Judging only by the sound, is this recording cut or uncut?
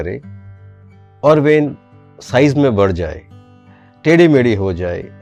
uncut